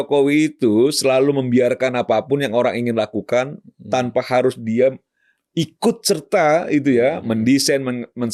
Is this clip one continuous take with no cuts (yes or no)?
yes